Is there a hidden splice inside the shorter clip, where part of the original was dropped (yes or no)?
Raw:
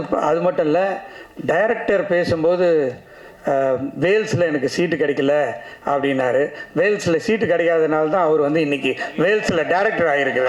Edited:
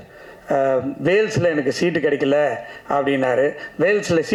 no